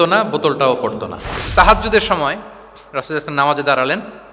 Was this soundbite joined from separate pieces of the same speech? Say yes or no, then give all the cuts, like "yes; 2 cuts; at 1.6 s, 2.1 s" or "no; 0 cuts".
yes; 1 cut; at 1.3 s